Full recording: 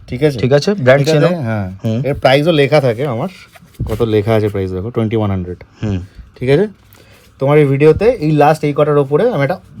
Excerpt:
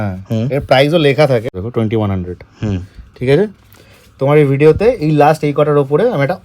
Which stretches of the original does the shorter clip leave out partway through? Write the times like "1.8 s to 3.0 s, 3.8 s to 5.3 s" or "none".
3.0 s to 4.7 s